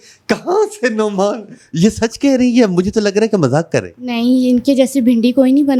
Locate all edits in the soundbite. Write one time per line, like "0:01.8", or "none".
none